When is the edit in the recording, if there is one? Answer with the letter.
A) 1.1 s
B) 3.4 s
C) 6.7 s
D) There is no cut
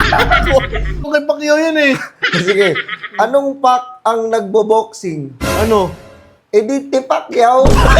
A